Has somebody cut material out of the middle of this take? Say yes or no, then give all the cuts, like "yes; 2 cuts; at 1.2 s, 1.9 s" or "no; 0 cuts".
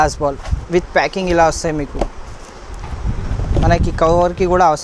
no; 0 cuts